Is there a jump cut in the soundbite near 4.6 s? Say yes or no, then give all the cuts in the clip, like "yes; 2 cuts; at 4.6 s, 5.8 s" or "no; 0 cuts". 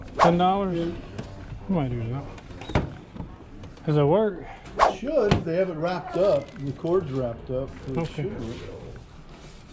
no; 0 cuts